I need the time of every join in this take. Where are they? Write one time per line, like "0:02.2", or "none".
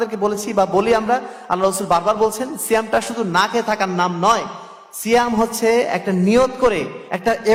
none